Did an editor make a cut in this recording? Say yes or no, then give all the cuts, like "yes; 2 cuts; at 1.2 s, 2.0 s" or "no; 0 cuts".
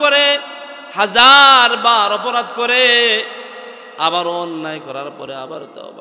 no; 0 cuts